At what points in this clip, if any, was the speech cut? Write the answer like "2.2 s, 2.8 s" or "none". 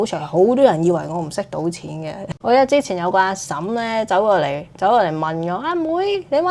2.3 s